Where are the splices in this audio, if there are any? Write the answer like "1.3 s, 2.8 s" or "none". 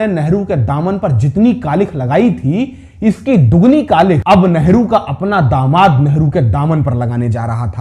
4.2 s